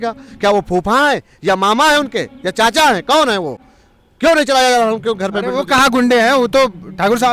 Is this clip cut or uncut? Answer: uncut